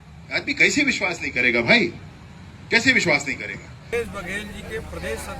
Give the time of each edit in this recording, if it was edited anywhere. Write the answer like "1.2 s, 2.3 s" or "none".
3.8 s